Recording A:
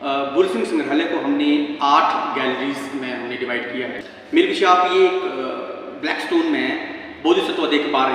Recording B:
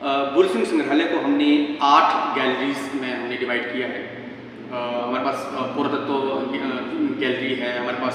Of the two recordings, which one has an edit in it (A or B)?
A